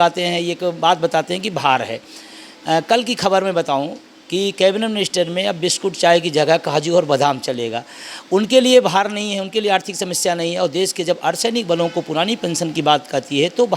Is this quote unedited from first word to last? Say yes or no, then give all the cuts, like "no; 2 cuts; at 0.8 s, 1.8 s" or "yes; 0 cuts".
yes; 0 cuts